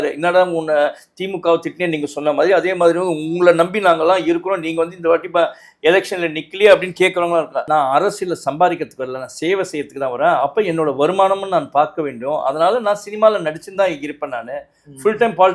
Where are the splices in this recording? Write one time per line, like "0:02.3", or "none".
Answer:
0:07.6